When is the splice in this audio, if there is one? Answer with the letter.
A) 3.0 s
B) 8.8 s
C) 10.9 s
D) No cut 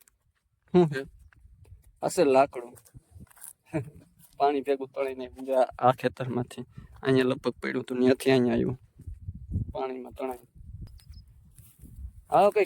C